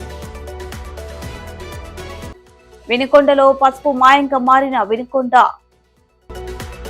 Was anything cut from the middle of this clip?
yes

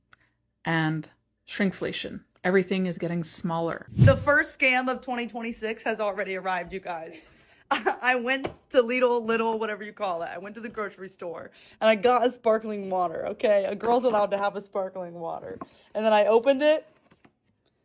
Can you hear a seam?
yes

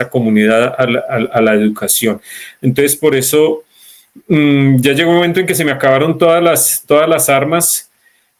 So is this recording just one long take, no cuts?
yes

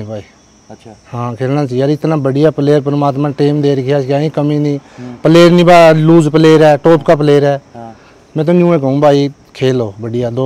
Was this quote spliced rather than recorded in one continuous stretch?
no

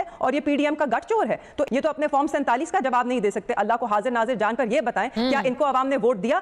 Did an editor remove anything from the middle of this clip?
no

